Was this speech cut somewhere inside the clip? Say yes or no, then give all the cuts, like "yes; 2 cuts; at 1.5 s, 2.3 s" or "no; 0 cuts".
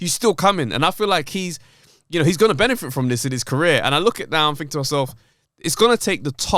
no; 0 cuts